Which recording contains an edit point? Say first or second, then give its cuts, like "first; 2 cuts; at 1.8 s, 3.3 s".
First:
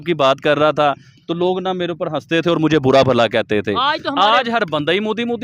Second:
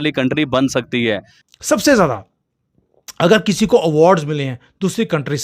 second; 1 cut; at 1.3 s